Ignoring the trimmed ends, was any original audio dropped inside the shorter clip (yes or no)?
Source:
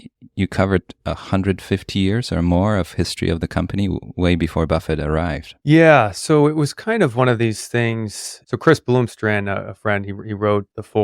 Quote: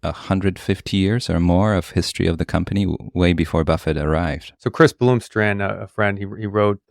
yes